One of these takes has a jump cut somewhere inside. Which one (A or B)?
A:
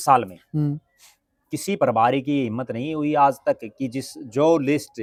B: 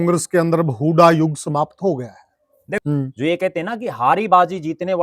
B